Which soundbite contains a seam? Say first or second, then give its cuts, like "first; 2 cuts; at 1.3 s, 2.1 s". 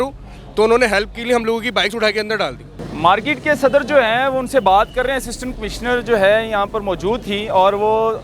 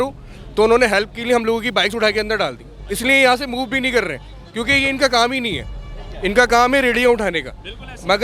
first; 1 cut; at 2.7 s